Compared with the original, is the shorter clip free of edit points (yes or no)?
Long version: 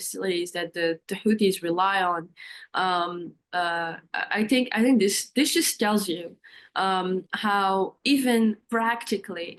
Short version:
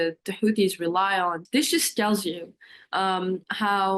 no